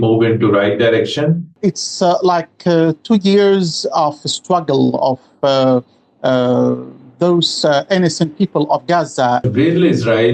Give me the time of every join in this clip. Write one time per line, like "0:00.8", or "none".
0:01.5
0:09.4